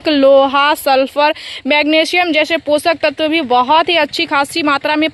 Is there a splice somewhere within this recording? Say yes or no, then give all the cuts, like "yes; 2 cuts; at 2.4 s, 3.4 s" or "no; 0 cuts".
no; 0 cuts